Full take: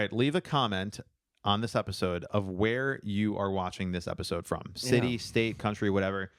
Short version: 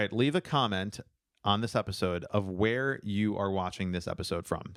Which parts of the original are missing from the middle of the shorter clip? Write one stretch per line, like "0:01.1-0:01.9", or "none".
none